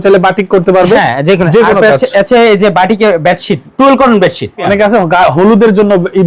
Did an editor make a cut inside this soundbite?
yes; 2 cuts; at 3.6 s, 4.6 s

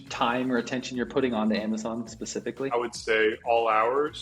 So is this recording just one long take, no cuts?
no; 1 cut; at 2.7 s

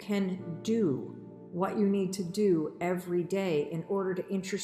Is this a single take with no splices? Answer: yes; 0 cuts

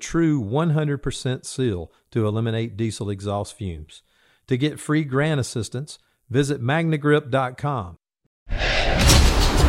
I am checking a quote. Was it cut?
yes; 1 cut; at 8.5 s

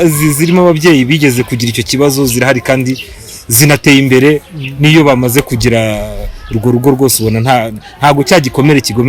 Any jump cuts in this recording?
no; 0 cuts

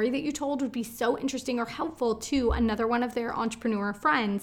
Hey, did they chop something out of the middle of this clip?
no; 0 cuts

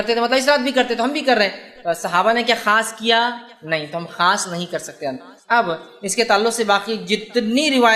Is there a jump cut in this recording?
yes; 1 cut; at 5.3 s

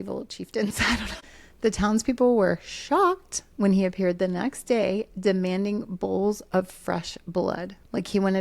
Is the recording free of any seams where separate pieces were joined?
no; 1 cut; at 1.5 s

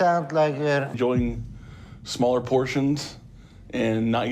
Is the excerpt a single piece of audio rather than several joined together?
no; 1 cut; at 1.0 s

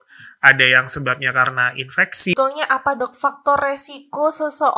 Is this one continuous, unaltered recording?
no; 1 cut; at 2.3 s

